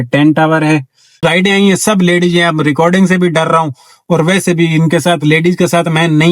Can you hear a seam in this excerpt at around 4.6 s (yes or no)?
no